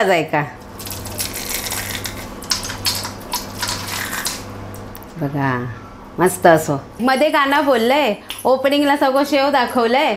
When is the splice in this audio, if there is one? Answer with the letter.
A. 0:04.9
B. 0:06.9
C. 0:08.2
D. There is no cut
D